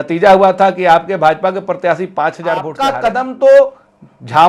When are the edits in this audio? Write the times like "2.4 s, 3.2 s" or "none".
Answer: 2.8 s